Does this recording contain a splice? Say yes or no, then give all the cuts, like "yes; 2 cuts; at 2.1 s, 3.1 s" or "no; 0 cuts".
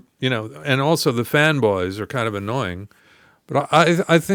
no; 0 cuts